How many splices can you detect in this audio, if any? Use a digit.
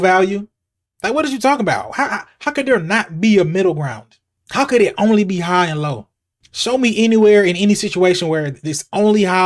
0